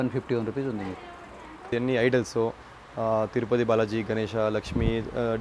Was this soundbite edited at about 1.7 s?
yes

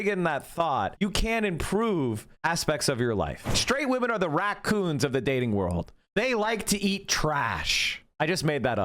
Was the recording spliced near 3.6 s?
yes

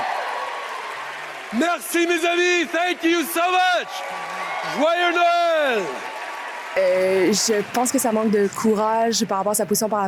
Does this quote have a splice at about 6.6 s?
yes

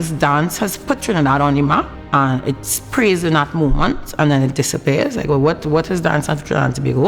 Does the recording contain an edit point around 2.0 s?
yes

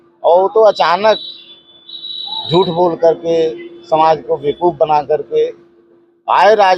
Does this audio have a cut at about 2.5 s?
no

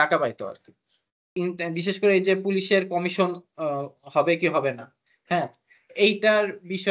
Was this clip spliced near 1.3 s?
yes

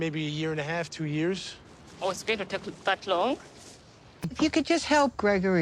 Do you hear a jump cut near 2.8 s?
no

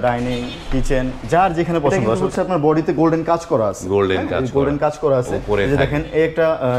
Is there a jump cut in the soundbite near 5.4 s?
yes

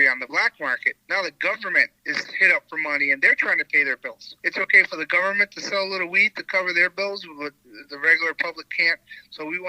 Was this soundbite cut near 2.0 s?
yes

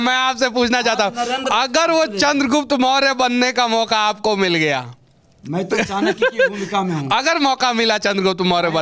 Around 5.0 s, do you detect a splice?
no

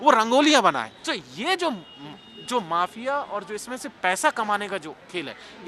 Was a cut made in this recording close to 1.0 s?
yes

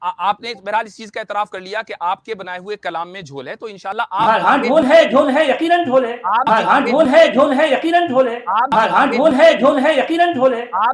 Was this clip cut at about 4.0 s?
yes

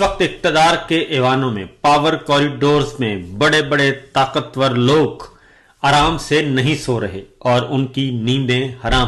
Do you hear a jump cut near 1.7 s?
no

